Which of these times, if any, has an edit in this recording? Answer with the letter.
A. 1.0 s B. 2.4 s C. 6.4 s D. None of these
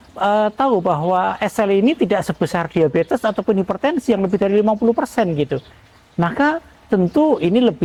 D